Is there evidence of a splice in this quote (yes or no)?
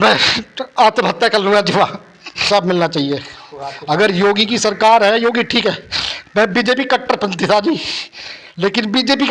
yes